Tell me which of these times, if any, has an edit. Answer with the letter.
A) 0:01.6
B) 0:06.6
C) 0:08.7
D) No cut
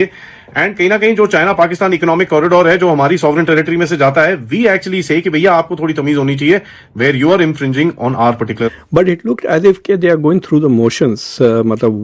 C